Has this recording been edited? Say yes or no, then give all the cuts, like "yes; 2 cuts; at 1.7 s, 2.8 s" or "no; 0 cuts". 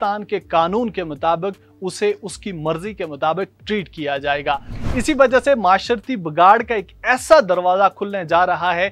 yes; 1 cut; at 4.7 s